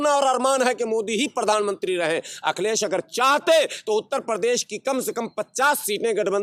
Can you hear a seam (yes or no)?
no